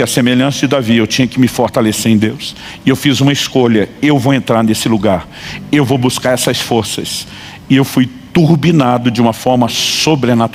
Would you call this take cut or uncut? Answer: uncut